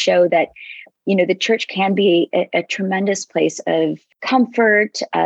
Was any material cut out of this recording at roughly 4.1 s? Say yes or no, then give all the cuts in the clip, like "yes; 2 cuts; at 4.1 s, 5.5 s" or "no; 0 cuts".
yes; 1 cut; at 4.1 s